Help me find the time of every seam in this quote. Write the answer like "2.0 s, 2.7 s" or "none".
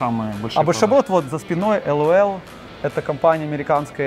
none